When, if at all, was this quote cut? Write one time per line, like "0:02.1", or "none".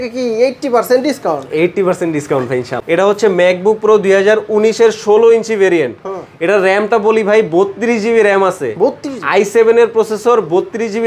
0:02.7

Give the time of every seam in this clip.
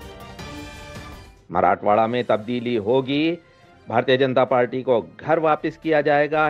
0:01.3

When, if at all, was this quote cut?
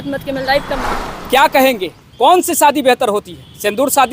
0:00.9

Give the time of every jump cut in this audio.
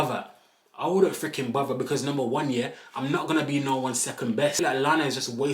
0:04.6

